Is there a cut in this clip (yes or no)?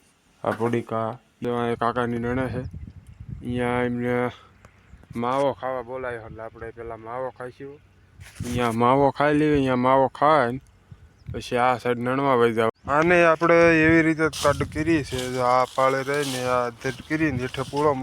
yes